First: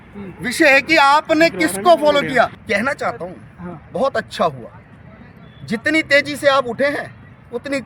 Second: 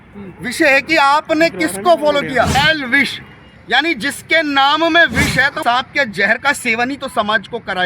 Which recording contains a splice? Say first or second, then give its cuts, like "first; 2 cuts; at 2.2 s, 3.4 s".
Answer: second; 2 cuts; at 2.5 s, 5.6 s